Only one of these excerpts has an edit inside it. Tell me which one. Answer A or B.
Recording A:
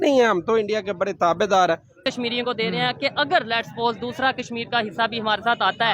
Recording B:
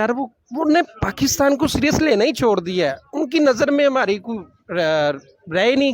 A